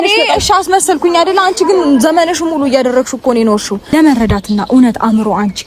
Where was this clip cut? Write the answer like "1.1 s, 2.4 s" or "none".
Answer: 3.9 s